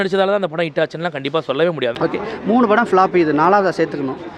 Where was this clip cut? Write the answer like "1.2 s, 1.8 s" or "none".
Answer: 1.9 s